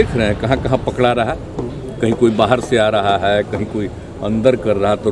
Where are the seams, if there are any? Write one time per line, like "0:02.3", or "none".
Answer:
none